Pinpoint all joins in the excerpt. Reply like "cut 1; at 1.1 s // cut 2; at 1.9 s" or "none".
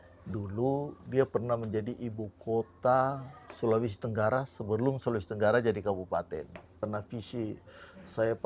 cut 1; at 6.8 s